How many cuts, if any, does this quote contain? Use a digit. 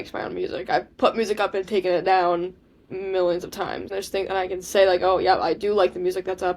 1